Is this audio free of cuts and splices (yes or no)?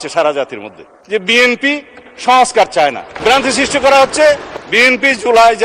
no